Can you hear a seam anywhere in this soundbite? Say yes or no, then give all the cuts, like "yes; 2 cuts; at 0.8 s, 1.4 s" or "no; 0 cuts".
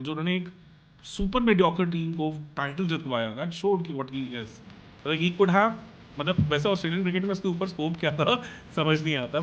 no; 0 cuts